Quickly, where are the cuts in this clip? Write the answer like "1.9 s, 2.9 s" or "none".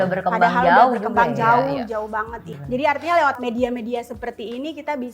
2.5 s, 3.4 s